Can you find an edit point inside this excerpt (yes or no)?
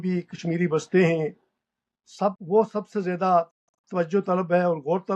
yes